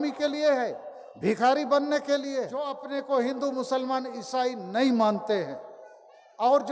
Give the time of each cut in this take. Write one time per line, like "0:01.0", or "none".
0:02.9